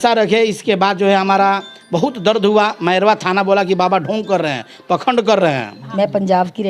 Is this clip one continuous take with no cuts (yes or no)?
no